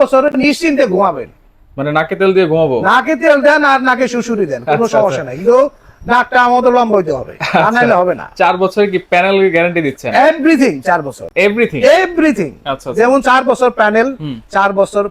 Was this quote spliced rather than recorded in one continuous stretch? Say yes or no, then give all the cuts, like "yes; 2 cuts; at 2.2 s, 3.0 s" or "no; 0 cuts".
no; 0 cuts